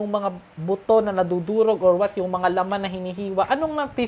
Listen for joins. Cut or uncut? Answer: uncut